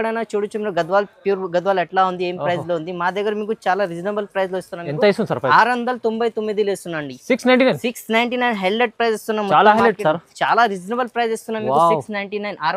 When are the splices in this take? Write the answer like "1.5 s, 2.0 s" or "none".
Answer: none